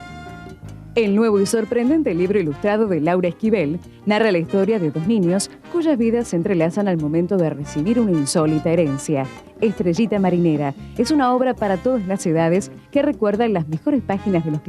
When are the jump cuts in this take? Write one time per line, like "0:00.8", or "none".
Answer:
0:00.9